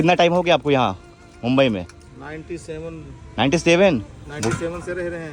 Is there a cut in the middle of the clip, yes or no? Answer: no